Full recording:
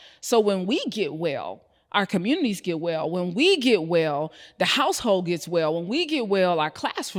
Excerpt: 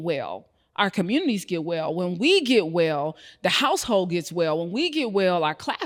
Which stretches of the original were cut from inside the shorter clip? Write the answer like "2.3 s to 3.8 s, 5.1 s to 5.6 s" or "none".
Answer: none

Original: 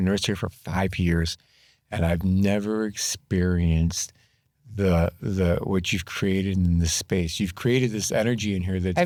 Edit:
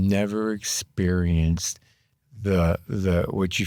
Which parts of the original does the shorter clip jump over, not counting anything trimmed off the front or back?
none

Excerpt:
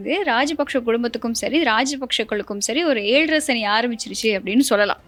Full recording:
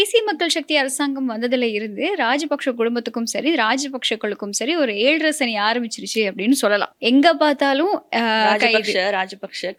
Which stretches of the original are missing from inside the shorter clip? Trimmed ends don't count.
none

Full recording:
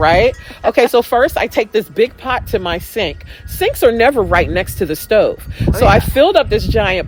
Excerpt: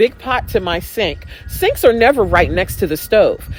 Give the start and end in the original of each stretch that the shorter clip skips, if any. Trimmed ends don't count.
none

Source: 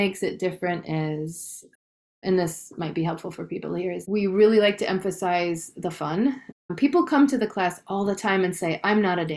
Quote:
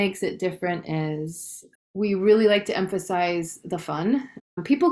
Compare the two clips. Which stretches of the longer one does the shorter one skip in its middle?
1.9 s to 4.0 s

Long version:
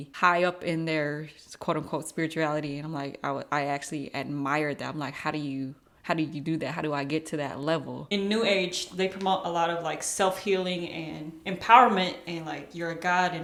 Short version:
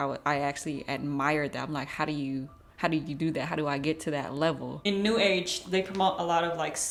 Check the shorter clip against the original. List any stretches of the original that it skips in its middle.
none

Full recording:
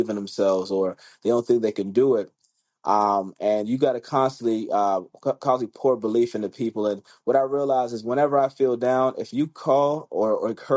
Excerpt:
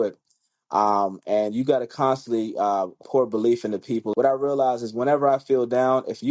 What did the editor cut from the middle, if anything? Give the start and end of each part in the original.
5.1 s to 5.7 s, 6.8 s to 7.2 s

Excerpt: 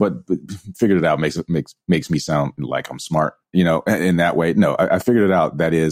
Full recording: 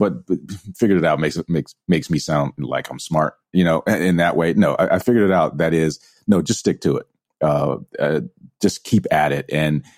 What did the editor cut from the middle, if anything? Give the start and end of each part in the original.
none

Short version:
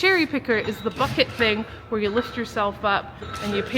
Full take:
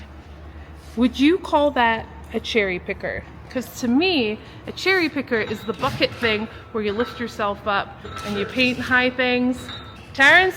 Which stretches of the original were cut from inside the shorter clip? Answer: none

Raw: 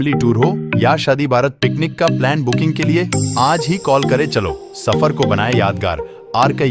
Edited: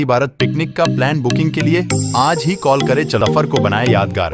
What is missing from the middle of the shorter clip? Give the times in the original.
4.4 s to 4.9 s

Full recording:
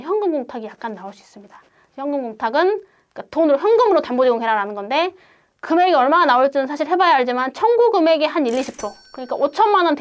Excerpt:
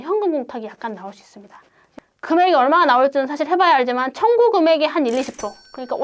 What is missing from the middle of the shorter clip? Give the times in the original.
1.9 s to 5.3 s

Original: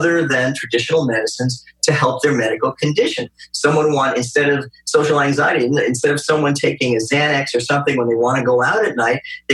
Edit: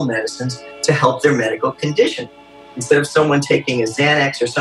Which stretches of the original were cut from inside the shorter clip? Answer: 3.7 s to 5.8 s

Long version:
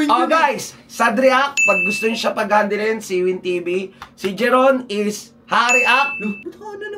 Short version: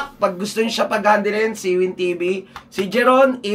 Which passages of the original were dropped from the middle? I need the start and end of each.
none

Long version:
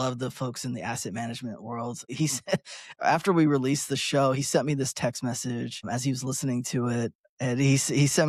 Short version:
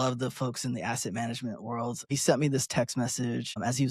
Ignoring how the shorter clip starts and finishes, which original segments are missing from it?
2.1 s to 4.4 s

